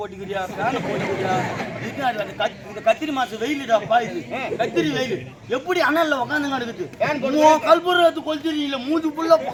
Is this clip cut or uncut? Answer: uncut